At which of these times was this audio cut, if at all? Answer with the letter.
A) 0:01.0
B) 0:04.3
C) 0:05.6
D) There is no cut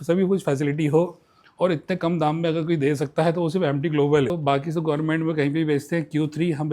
B